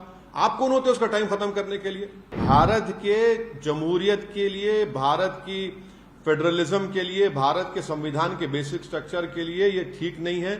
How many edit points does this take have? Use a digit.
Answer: 1